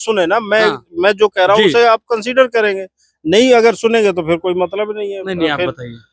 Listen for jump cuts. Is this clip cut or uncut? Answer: uncut